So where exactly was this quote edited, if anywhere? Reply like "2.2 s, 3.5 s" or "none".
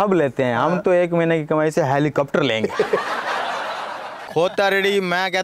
3.0 s, 4.2 s